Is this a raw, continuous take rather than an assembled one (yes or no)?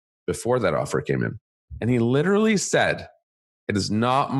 no